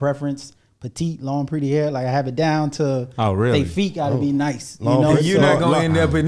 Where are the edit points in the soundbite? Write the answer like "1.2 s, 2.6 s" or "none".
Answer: none

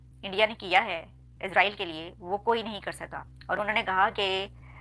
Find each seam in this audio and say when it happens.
none

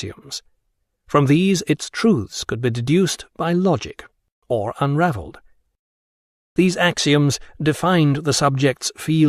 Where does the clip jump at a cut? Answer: none

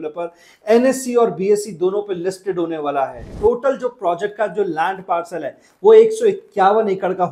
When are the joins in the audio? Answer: 3.2 s

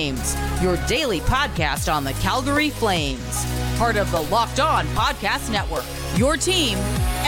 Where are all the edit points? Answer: none

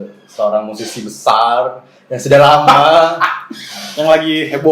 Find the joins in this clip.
none

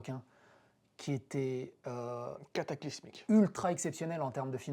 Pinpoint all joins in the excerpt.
none

